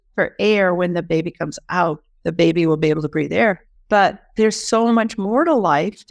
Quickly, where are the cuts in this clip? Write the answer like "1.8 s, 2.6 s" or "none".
2.1 s, 3.7 s